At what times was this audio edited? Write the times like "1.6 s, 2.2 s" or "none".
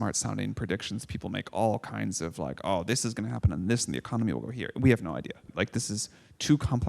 5.5 s